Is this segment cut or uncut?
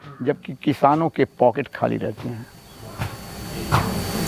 uncut